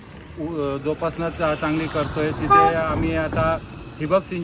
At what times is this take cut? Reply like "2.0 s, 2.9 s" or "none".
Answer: none